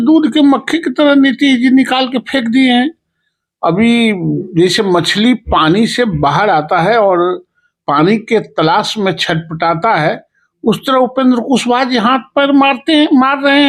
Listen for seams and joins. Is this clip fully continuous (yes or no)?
yes